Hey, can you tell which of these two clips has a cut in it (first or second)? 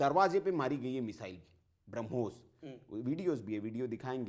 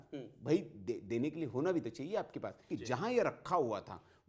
second